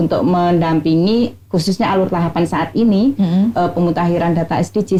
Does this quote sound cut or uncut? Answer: uncut